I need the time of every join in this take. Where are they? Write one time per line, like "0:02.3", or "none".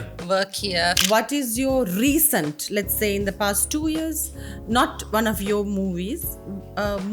0:01.0